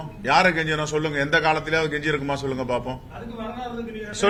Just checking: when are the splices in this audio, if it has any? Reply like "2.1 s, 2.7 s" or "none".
none

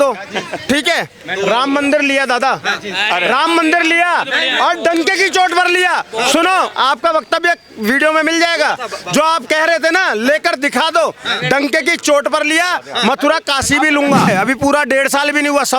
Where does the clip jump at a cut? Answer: 14.3 s

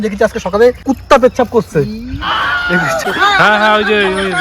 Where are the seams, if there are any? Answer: 0.8 s, 3.1 s

